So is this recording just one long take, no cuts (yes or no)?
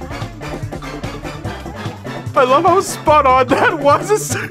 no